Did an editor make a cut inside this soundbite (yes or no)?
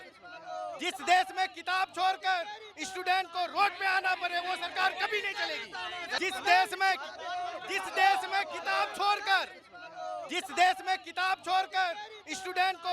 yes